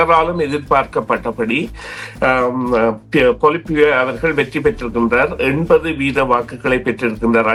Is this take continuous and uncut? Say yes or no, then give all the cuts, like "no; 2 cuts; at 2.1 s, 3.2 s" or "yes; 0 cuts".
yes; 0 cuts